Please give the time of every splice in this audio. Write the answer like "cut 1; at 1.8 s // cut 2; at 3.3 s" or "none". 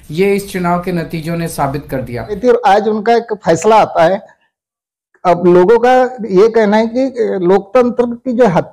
cut 1; at 2.4 s